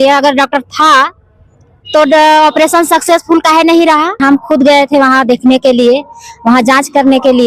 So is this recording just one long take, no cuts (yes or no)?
no